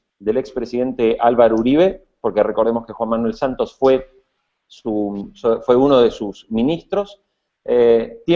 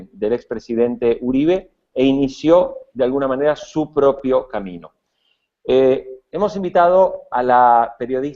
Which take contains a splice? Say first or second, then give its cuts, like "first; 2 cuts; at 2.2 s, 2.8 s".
second; 1 cut; at 2.8 s